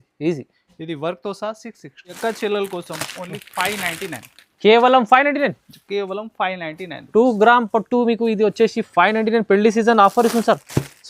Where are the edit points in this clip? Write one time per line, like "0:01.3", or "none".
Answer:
0:02.2